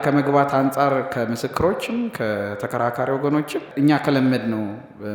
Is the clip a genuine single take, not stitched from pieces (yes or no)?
no